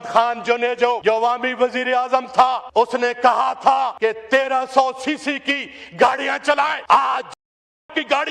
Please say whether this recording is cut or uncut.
cut